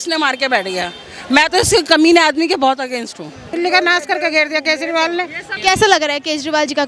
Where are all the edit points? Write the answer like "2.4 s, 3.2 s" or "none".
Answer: 3.5 s, 5.5 s